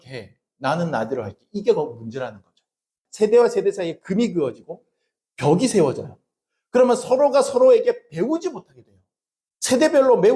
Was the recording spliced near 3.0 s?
yes; 1 cut; at 3.0 s

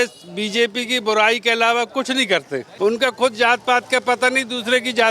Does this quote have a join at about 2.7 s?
yes; 1 cut; at 2.7 s

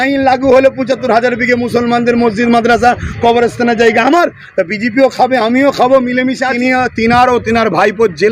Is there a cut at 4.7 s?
no; 1 cut; at 6.5 s

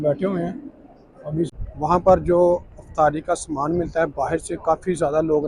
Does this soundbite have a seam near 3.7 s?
no; 1 cut; at 1.5 s

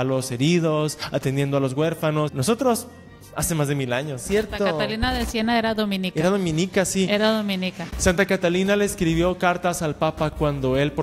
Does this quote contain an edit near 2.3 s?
yes; 2 cuts; at 2.3 s, 4.2 s

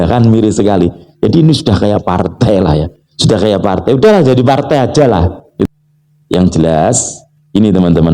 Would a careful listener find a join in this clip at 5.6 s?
yes; 1 cut; at 5.6 s

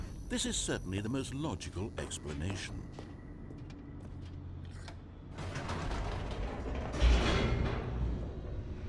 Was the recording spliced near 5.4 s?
yes; 2 cuts; at 2.7 s, 5.4 s

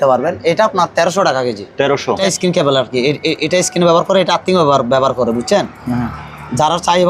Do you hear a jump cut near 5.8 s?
no; 1 cut; at 2.2 s

